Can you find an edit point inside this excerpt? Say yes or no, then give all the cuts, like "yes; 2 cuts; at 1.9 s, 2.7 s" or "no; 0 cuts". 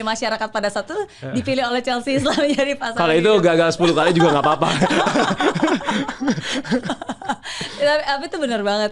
no; 0 cuts